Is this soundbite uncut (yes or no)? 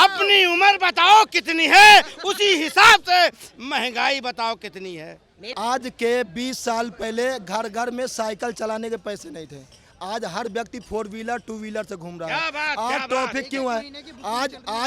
no